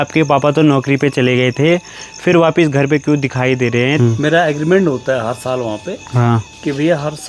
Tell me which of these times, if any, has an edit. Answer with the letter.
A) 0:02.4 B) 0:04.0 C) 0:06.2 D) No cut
B